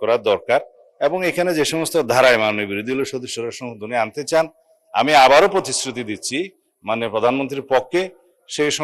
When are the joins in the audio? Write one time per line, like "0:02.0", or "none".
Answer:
none